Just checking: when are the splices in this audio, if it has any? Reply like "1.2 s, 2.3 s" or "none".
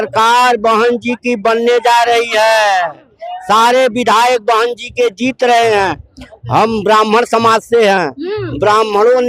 none